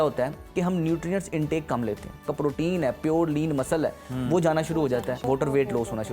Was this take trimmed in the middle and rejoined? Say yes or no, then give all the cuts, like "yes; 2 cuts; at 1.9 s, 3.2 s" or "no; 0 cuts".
yes; 2 cuts; at 2.3 s, 5.2 s